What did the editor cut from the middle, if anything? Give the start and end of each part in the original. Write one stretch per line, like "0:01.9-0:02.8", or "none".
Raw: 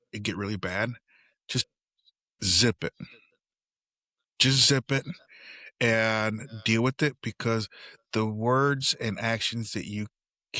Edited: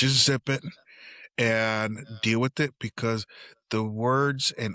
none